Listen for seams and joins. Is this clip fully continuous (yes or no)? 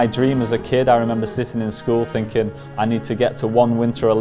no